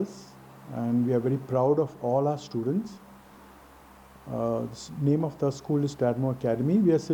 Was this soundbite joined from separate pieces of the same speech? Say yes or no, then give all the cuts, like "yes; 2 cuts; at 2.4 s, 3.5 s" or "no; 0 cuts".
no; 0 cuts